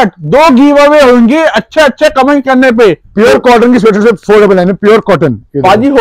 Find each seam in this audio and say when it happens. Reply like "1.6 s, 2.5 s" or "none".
none